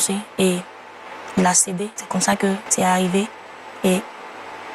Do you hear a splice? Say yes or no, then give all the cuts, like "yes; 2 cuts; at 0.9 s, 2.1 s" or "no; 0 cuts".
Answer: yes; 2 cuts; at 2.0 s, 2.7 s